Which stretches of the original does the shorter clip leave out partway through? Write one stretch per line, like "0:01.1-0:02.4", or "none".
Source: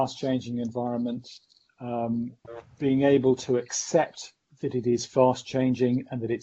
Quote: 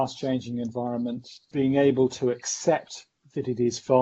0:01.3-0:02.6